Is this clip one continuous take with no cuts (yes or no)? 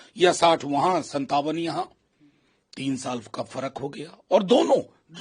yes